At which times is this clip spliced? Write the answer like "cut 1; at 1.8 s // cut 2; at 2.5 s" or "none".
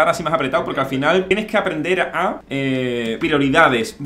cut 1; at 1.3 s // cut 2; at 2.8 s